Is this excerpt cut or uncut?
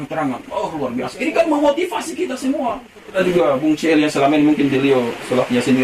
cut